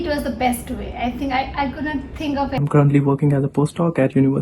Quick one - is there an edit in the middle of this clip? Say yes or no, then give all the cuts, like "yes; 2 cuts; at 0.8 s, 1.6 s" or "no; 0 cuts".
yes; 1 cut; at 2.5 s